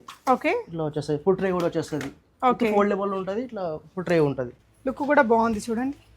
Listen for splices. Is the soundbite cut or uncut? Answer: cut